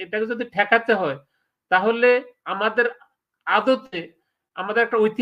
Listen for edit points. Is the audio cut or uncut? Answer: uncut